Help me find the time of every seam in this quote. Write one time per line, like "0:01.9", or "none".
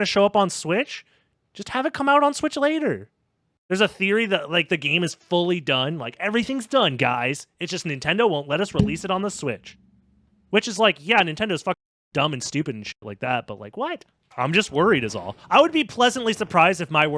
0:14.2